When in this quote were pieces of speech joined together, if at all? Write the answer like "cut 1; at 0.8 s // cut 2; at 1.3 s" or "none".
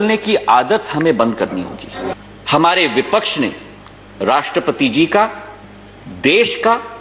cut 1; at 2.1 s